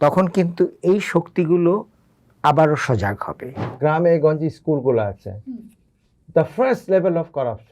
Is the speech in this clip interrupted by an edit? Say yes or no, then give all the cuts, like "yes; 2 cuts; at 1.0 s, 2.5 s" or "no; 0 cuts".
yes; 1 cut; at 3.6 s